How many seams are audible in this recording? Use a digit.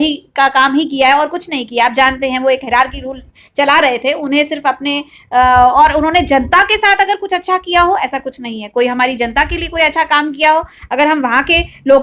0